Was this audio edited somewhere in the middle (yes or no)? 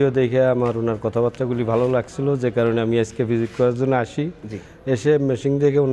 no